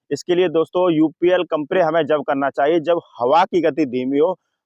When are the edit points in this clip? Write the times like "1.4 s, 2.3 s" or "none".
1.6 s